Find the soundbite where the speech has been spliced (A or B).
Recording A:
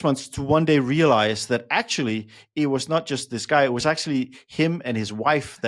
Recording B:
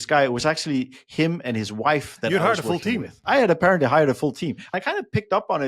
B